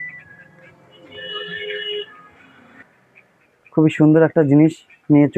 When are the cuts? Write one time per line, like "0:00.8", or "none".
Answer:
0:03.7